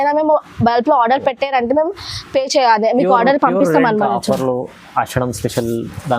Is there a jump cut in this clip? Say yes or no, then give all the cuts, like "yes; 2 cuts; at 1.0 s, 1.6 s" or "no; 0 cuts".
yes; 1 cut; at 4.1 s